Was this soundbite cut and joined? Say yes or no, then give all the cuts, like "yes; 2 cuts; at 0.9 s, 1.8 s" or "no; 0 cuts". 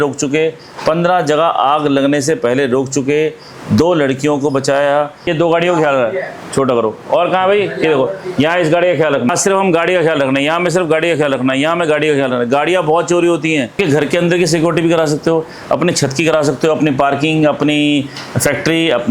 yes; 3 cuts; at 5.3 s, 9.3 s, 13.7 s